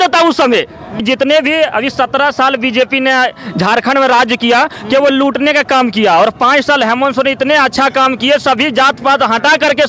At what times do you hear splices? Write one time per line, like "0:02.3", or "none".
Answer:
0:01.0